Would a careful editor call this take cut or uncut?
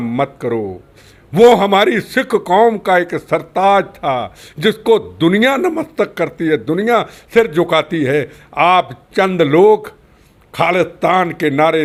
uncut